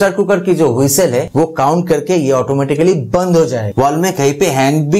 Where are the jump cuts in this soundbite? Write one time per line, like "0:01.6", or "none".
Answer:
0:03.7